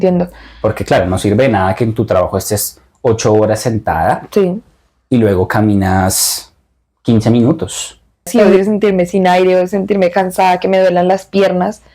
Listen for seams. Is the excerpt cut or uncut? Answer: cut